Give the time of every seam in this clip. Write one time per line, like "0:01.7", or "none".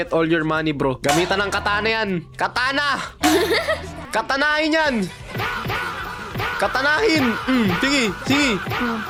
none